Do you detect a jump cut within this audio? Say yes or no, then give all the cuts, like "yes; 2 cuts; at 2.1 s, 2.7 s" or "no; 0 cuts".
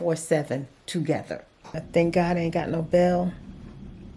yes; 1 cut; at 1.8 s